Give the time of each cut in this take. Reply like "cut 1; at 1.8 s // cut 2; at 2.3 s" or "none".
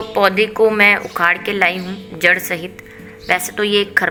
none